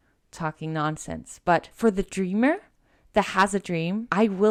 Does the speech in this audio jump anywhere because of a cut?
no; 0 cuts

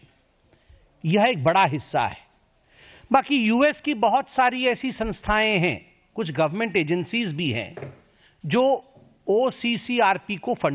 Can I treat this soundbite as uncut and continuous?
no; 1 cut; at 7.7 s

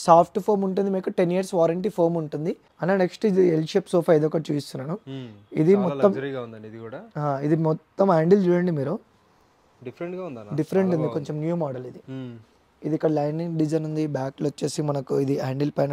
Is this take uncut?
no; 1 cut; at 2.7 s

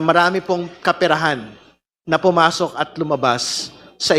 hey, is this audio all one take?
yes; 0 cuts

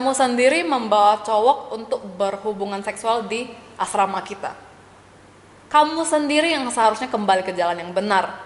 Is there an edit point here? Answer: no; 0 cuts

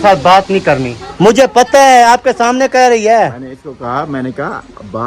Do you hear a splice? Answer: yes; 1 cut; at 1.0 s

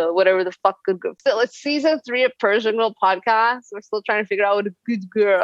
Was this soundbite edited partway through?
yes; 1 cut; at 1.1 s

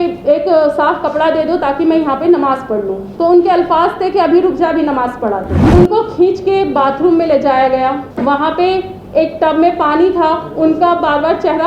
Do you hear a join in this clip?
yes; 2 cuts; at 5.5 s, 8.1 s

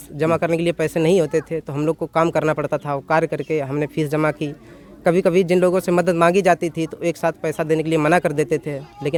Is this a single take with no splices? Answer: yes; 0 cuts

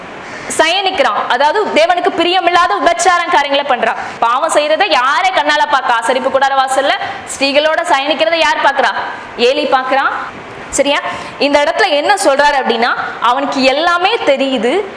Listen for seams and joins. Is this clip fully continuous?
no; 2 cuts; at 4.1 s, 10.2 s

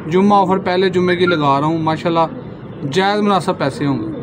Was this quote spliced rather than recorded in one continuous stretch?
no; 0 cuts

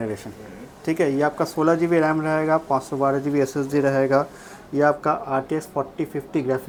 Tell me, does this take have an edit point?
no; 0 cuts

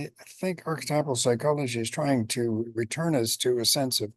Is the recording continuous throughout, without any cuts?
yes; 0 cuts

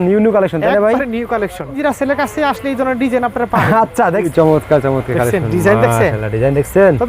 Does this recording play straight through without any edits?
no; 2 cuts; at 1.8 s, 4.3 s

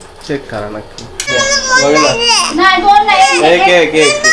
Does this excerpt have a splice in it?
yes; 1 cut; at 1.3 s

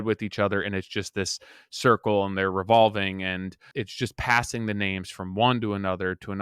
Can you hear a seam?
yes; 1 cut; at 3.6 s

